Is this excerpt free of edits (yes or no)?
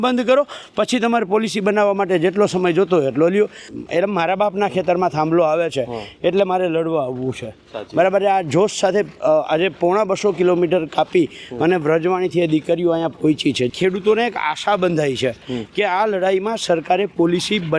no